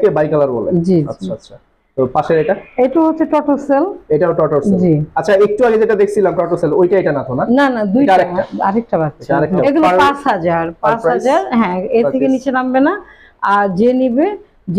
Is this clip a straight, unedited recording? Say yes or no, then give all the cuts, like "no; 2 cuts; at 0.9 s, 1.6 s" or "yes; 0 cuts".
no; 1 cut; at 9.6 s